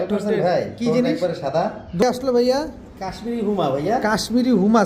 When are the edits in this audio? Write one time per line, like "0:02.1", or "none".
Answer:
0:02.0